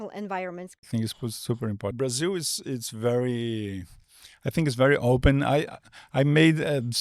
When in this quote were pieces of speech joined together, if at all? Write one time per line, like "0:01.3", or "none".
0:00.9
0:01.9